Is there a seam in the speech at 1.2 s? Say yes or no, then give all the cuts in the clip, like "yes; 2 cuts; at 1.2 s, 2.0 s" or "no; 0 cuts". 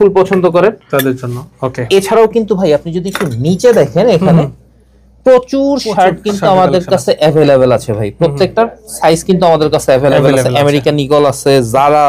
no; 0 cuts